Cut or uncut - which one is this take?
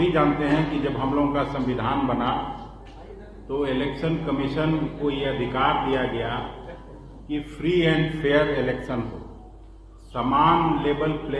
uncut